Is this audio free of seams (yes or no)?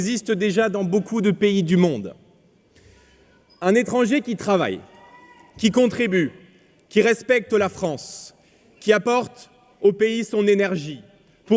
yes